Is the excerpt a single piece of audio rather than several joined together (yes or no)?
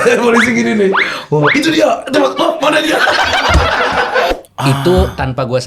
no